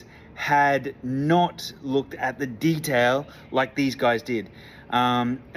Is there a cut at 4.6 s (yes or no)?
no